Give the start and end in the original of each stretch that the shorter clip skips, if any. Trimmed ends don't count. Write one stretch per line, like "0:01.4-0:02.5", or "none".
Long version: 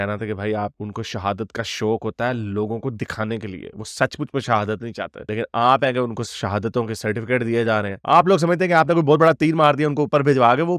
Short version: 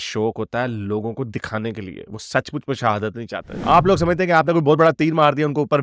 0:05.2-0:07.9